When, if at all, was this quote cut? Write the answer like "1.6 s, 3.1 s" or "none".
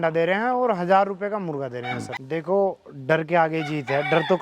2.1 s